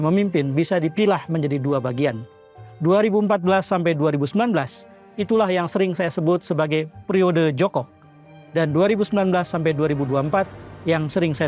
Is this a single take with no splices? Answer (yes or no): yes